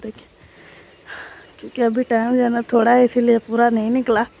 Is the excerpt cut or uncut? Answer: uncut